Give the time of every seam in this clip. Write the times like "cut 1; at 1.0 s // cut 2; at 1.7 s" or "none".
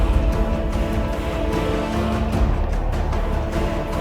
none